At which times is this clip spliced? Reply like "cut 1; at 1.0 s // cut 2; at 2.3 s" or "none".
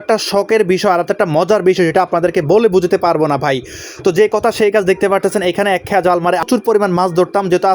cut 1; at 6.4 s